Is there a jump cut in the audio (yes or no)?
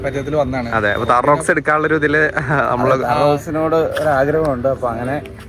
no